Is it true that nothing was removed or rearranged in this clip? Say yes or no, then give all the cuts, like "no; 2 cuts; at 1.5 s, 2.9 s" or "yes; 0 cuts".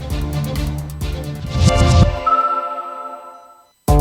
yes; 0 cuts